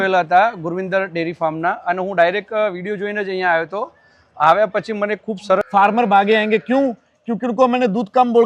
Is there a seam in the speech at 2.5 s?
no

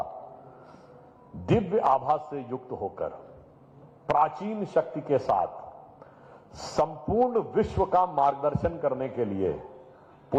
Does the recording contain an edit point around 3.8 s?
no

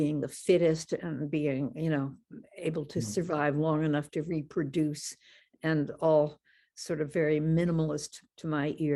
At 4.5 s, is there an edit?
no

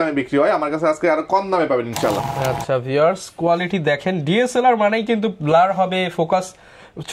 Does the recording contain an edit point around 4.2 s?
no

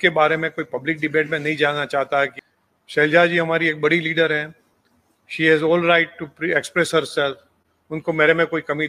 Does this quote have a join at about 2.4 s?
yes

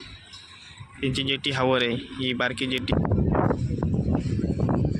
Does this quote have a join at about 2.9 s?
yes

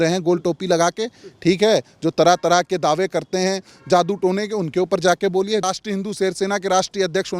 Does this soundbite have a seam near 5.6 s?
yes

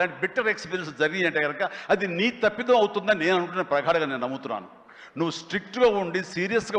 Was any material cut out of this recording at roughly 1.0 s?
no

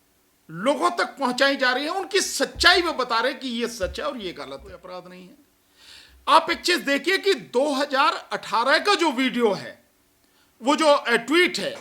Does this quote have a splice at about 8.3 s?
no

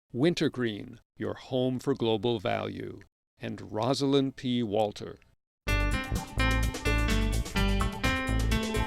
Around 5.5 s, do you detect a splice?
yes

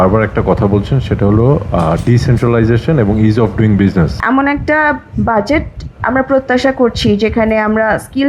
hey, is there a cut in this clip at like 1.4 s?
no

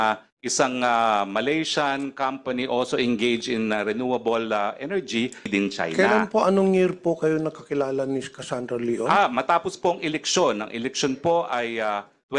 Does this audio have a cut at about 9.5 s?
no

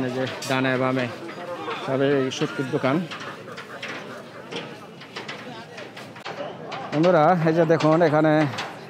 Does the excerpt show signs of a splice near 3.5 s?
no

